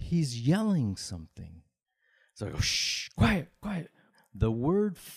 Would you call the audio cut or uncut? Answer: cut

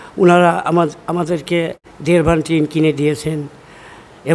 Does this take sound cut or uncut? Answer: cut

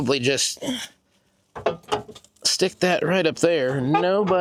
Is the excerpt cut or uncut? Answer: uncut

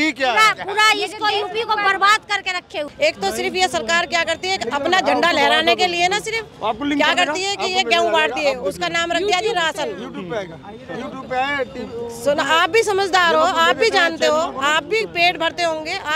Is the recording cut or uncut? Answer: cut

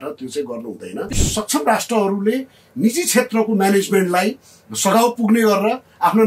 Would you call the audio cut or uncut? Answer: cut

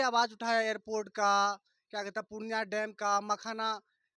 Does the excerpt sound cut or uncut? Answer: uncut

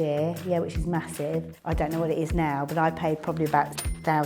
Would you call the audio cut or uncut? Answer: cut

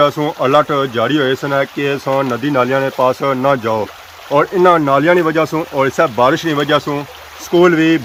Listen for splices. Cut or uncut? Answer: uncut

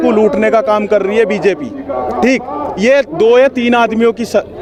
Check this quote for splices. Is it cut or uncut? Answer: uncut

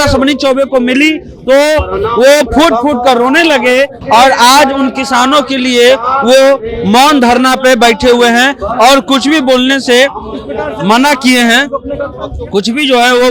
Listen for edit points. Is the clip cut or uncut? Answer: uncut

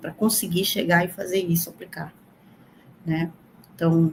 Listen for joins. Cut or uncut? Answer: uncut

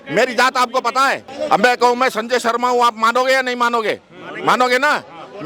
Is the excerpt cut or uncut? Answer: cut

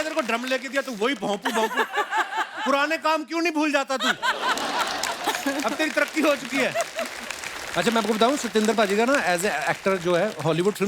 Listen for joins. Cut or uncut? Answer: uncut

